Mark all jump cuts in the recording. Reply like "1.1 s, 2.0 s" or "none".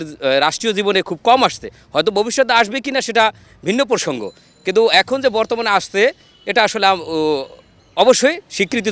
none